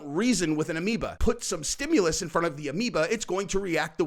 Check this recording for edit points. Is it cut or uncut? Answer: cut